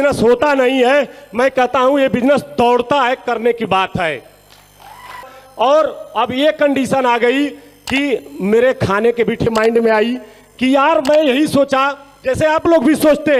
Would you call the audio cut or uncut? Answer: cut